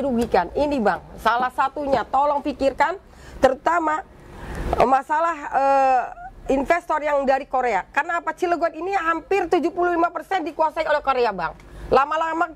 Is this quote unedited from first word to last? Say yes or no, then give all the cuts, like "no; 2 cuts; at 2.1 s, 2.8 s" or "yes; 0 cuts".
yes; 0 cuts